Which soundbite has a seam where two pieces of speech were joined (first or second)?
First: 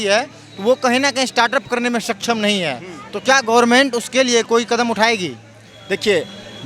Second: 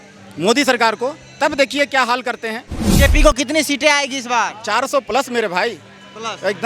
second